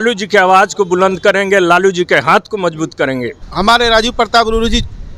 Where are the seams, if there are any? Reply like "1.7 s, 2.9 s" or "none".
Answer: 3.4 s